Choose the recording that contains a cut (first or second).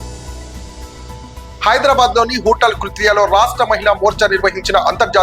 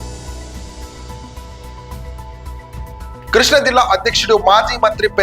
second